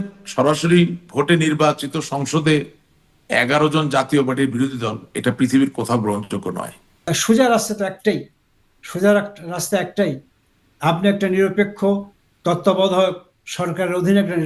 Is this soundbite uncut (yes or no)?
no